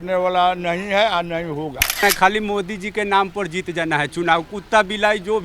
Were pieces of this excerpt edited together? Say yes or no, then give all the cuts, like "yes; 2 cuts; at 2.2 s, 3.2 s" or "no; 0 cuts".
yes; 1 cut; at 2.0 s